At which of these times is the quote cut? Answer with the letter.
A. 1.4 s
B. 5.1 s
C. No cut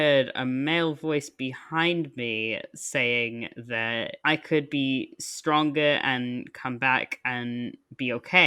C